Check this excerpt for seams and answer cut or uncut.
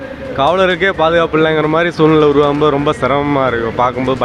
uncut